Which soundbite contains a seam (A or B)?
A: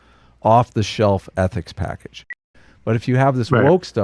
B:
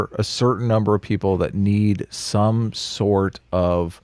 A